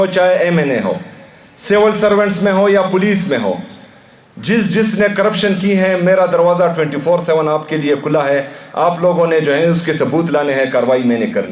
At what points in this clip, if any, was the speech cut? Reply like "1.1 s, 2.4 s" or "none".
none